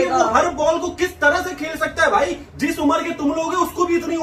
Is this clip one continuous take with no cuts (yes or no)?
yes